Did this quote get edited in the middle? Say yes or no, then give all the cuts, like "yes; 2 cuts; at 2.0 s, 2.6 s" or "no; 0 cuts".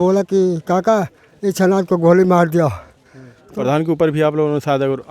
yes; 1 cut; at 3.6 s